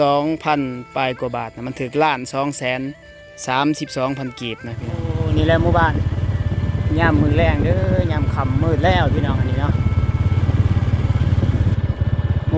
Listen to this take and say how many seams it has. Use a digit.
1